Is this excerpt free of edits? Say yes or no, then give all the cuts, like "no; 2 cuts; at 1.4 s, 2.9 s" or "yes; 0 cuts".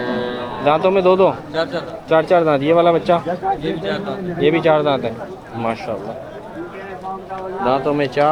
yes; 0 cuts